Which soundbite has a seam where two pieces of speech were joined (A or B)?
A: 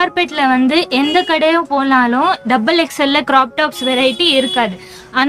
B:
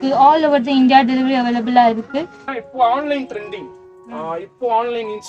B